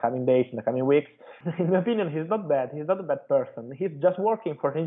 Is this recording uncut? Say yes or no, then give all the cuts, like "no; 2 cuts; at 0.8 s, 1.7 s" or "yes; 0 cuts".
no; 1 cut; at 1.2 s